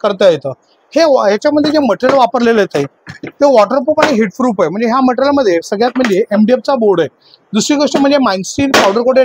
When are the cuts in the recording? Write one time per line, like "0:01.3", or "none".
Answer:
none